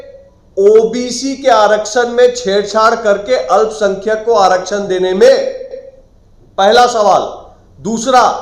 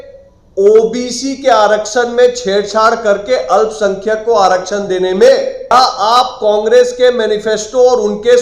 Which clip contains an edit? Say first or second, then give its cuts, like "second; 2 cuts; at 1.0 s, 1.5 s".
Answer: second; 1 cut; at 5.7 s